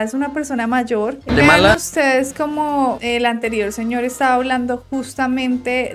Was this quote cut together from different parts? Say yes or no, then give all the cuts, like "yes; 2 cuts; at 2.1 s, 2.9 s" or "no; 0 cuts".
yes; 1 cut; at 1.3 s